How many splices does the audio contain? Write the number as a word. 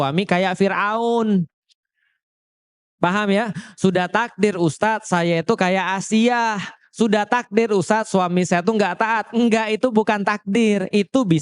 zero